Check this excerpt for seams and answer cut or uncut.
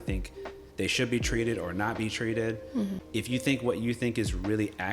cut